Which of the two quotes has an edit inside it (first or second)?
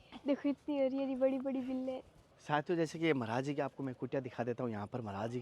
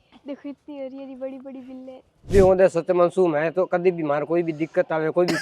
second